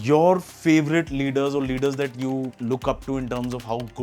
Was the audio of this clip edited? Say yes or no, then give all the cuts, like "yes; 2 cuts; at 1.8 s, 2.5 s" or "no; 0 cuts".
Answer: yes; 1 cut; at 2.5 s